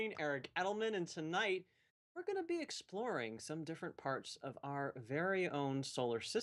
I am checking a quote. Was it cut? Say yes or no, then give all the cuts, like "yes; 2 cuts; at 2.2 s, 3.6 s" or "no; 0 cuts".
no; 0 cuts